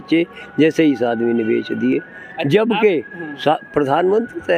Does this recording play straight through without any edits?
yes; 0 cuts

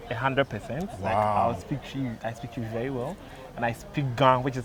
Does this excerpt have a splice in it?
no; 0 cuts

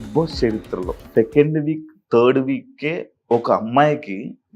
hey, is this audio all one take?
no; 1 cut; at 1.0 s

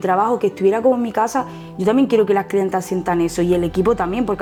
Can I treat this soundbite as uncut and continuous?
yes; 0 cuts

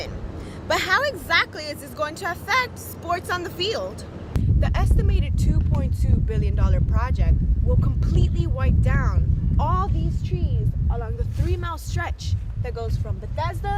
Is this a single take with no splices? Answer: no; 1 cut; at 4.3 s

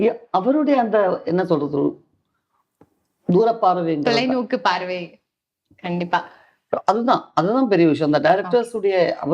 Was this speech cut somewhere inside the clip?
no; 0 cuts

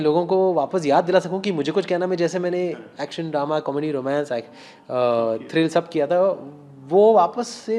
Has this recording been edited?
no; 0 cuts

